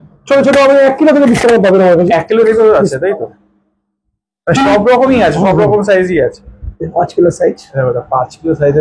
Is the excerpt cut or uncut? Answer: uncut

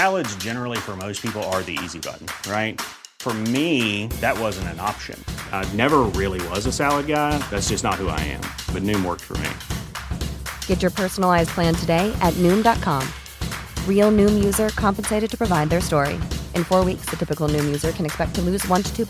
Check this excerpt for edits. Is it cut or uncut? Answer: uncut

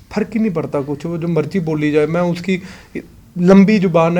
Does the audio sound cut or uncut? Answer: uncut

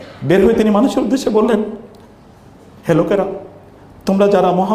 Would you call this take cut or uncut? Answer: uncut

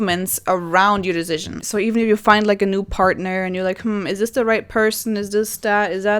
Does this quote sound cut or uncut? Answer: cut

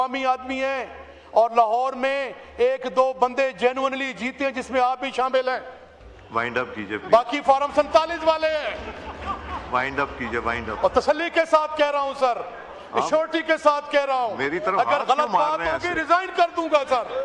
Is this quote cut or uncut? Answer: uncut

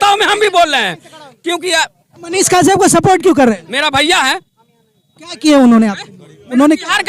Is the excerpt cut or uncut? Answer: uncut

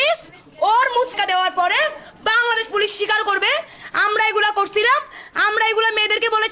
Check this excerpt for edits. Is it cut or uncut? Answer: cut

